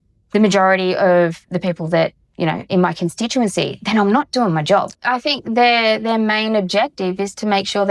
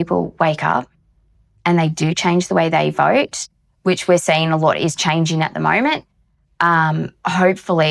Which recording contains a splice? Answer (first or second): first